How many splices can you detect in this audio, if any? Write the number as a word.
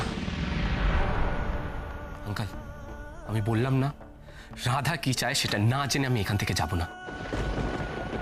one